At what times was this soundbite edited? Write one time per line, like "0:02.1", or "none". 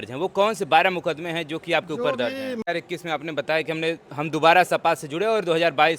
0:02.6